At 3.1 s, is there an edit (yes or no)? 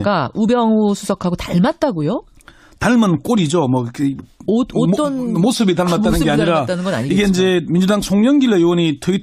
yes